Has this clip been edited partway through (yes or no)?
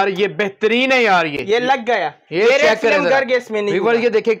no